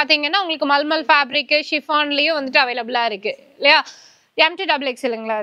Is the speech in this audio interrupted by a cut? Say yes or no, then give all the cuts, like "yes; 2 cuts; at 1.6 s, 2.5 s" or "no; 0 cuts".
no; 0 cuts